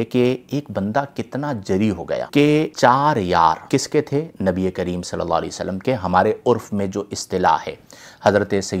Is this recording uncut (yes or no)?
yes